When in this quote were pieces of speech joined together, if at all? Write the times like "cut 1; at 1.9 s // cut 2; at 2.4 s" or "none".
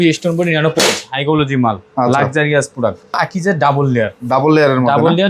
cut 1; at 3.2 s